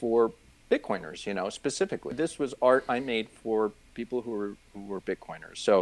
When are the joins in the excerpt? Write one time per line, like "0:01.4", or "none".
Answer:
0:02.1